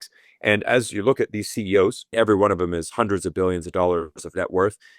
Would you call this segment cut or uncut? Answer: cut